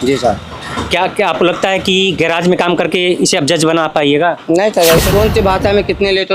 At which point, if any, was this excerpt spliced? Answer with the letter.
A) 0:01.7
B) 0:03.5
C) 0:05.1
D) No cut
C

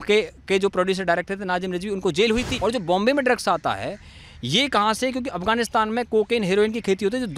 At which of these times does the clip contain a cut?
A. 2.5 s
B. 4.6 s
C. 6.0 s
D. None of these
A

